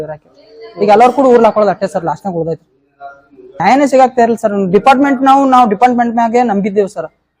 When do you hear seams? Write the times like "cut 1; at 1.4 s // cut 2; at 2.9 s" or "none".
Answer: cut 1; at 3.6 s